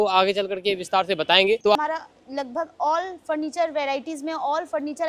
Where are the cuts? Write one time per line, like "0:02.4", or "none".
0:01.8